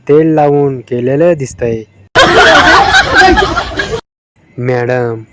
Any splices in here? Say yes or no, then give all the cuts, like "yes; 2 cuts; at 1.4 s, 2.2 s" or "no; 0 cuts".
yes; 2 cuts; at 2.1 s, 4.2 s